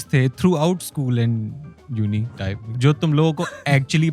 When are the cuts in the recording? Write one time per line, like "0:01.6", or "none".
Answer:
0:02.7